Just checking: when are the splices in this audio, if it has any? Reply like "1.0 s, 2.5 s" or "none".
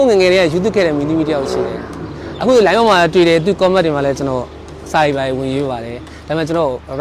none